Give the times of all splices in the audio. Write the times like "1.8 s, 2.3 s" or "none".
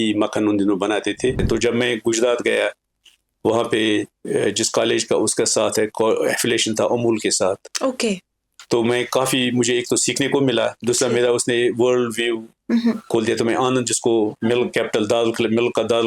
1.4 s